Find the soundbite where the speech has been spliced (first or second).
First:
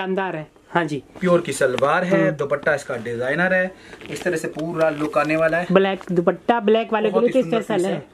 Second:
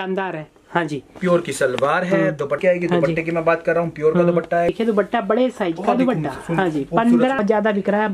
second